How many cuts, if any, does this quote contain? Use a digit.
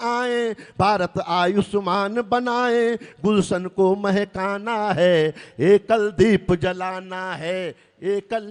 0